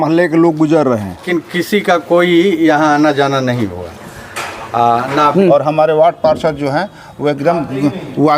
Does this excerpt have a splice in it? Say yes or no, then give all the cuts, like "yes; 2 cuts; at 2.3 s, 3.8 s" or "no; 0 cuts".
yes; 2 cuts; at 1.2 s, 5.3 s